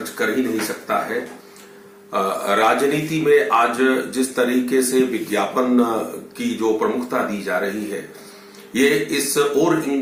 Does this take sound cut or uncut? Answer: uncut